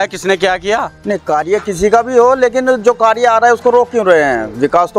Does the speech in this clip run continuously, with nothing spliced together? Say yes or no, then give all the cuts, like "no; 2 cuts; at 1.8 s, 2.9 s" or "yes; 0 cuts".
no; 1 cut; at 0.9 s